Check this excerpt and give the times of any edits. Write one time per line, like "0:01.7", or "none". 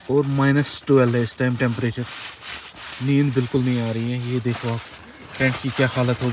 none